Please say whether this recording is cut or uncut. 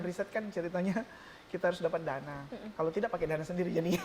uncut